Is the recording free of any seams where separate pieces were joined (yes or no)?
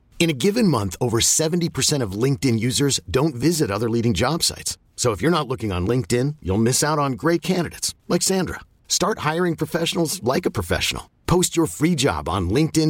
yes